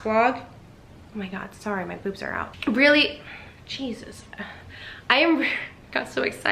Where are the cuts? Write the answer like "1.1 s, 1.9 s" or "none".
none